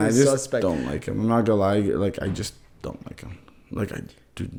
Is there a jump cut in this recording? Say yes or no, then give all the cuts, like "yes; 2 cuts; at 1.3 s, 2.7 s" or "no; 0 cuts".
no; 0 cuts